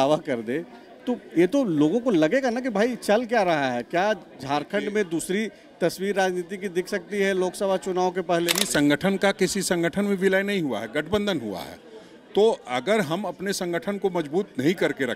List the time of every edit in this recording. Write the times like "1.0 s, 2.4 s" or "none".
8.7 s